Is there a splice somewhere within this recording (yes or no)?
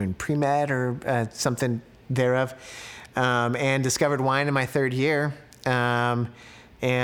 no